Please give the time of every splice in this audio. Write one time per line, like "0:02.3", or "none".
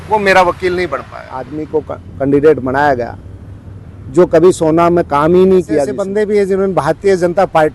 0:01.6
0:06.0